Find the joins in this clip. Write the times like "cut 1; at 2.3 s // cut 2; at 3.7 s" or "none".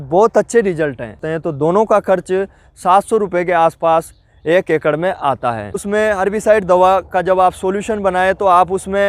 cut 1; at 1.2 s // cut 2; at 5.7 s